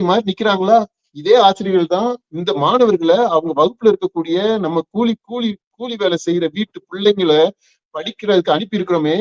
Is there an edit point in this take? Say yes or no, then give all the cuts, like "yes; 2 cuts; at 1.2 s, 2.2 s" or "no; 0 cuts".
no; 0 cuts